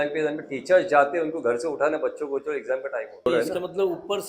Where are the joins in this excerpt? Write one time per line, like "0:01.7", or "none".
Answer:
0:03.3